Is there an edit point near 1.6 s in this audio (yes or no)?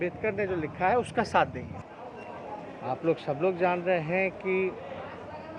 yes